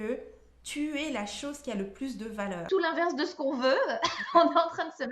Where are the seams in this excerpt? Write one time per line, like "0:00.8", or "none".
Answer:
0:02.6

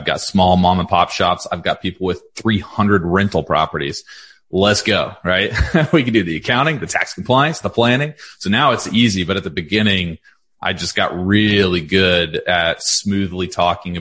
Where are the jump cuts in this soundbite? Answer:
none

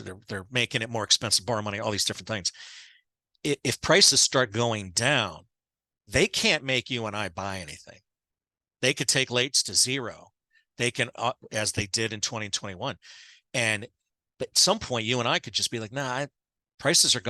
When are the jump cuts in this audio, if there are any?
none

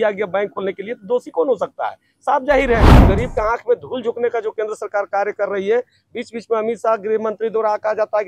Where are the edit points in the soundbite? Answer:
0:03.0

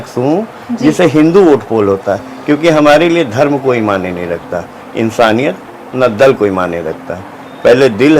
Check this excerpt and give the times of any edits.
none

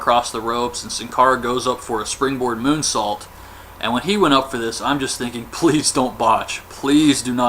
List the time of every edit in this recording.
0:02.1

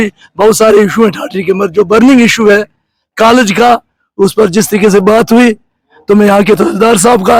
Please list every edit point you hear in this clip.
none

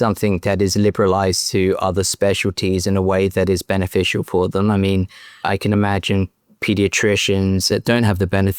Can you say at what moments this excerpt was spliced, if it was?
0:07.7

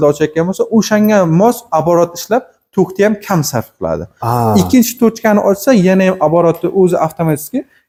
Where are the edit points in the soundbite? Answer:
none

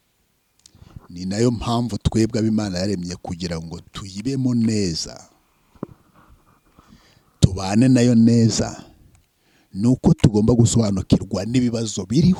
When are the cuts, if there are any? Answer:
none

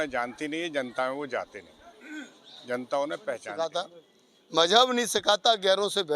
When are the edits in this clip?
0:03.6

